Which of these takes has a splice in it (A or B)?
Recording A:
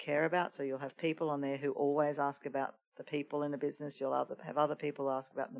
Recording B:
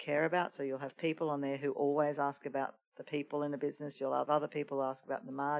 B